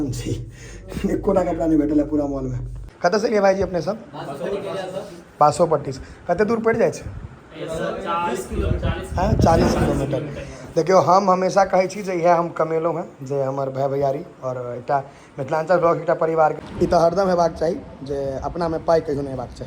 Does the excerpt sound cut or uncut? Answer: cut